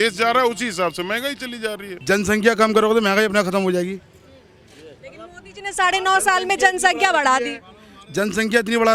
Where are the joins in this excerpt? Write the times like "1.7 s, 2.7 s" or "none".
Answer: none